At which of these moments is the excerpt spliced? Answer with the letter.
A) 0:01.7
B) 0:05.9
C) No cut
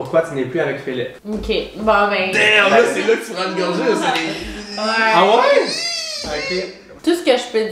C